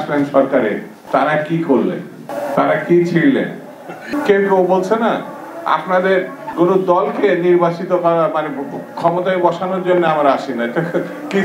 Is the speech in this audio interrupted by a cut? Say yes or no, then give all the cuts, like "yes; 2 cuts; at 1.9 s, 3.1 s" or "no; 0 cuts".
yes; 4 cuts; at 0.9 s, 2.3 s, 4.1 s, 6.4 s